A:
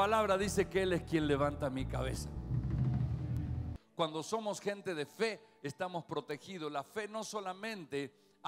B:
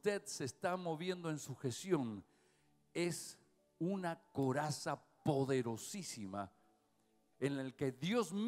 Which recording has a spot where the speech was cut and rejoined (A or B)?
A